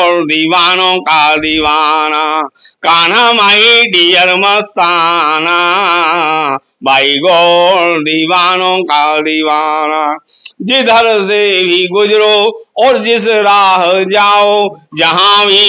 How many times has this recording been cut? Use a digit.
0